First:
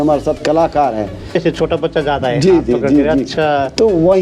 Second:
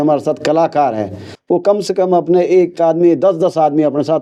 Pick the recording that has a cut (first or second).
first